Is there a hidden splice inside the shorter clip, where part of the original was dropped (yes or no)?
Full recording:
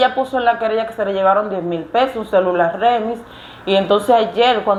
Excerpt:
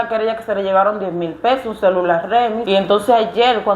yes